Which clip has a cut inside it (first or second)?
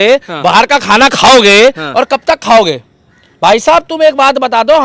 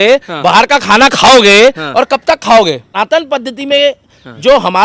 second